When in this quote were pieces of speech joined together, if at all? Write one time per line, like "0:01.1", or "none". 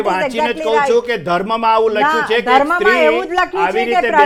none